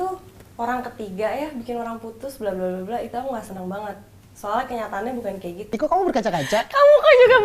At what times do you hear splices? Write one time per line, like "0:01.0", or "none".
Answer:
0:05.7